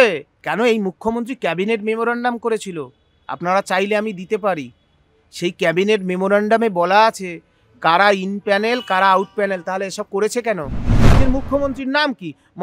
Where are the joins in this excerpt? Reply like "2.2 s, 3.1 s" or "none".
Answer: 11.2 s